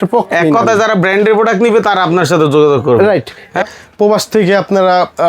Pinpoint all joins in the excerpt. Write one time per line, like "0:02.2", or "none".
0:03.6